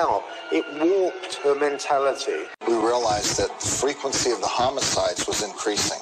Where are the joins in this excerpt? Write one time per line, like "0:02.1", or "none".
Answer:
0:02.5

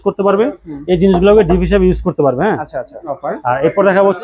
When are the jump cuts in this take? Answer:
0:03.3

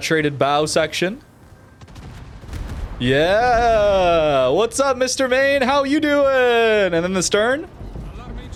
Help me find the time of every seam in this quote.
none

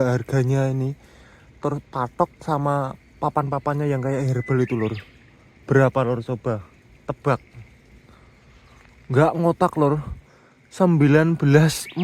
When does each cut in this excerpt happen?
none

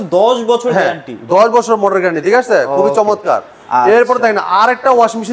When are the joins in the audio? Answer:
none

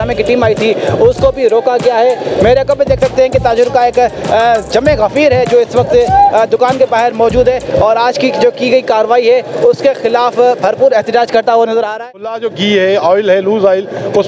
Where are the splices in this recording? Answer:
0:12.3

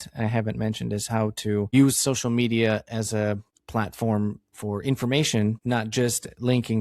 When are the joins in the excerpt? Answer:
0:01.7
0:03.5
0:05.6

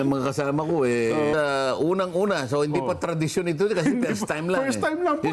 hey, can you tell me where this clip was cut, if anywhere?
0:01.3

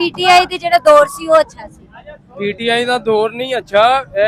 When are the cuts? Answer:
none

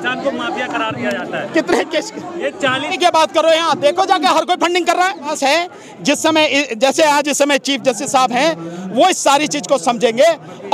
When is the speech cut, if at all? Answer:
0:02.9
0:05.3

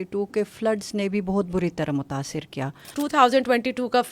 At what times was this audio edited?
0:02.9

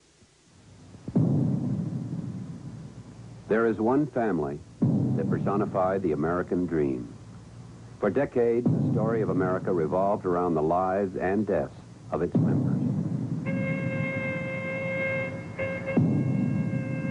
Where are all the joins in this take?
0:03.2

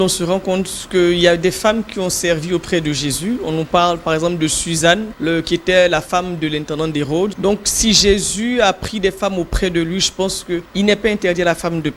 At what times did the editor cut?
0:05.1
0:07.3
0:10.7

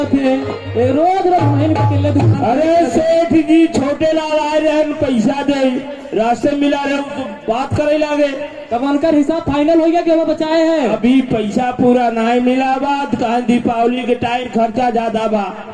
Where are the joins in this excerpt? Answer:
none

